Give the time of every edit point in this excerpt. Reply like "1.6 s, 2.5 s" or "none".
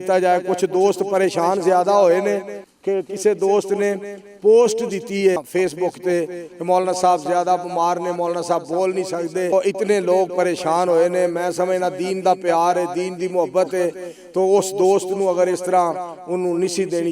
5.4 s, 9.5 s